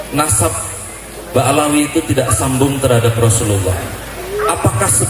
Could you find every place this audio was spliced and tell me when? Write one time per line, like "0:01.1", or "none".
none